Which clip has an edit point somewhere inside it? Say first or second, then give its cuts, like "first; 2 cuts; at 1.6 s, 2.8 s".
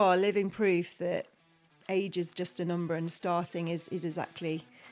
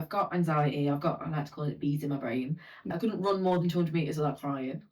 second; 1 cut; at 2.8 s